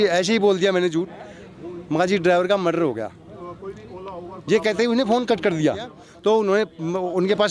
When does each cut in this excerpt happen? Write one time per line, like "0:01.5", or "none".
0:06.0